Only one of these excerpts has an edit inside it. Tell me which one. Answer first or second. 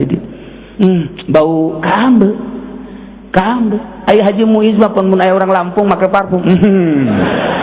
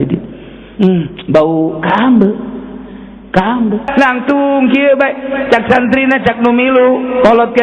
second